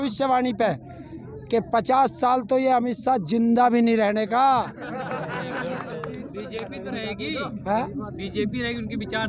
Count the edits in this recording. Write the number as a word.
zero